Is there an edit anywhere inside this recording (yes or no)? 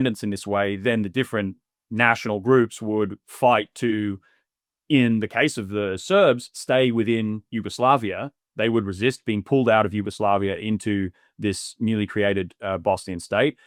no